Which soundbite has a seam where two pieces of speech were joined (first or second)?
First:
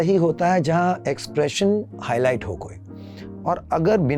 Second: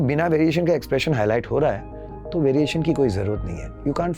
first